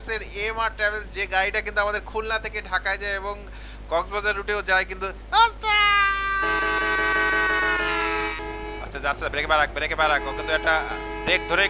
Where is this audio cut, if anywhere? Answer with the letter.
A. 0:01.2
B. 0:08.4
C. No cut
B